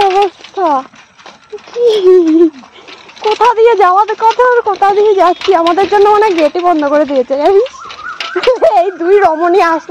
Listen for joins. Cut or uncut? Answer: uncut